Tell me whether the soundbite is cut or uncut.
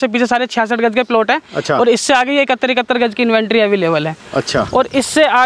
uncut